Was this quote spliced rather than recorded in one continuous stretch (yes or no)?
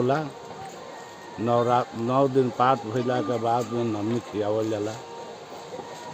no